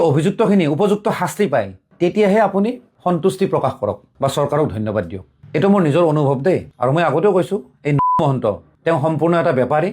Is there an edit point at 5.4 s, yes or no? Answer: no